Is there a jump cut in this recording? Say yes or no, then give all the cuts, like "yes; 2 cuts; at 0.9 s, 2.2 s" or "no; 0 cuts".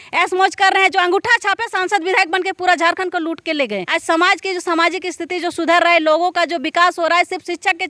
yes; 1 cut; at 3.9 s